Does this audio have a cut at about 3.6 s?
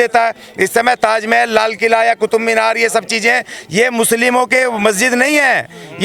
no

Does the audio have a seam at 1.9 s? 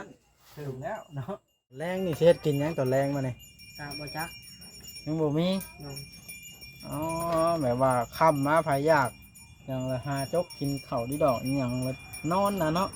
yes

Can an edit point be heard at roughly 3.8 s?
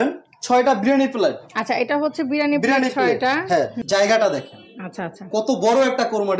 yes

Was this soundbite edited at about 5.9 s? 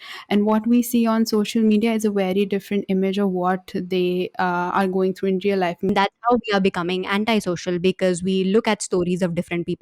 yes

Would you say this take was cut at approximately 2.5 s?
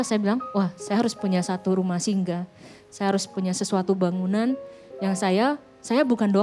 no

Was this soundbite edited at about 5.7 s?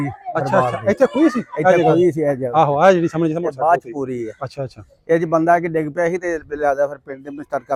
no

